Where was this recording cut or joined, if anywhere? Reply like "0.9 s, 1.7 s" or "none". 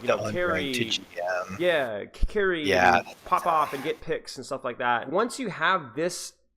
5.1 s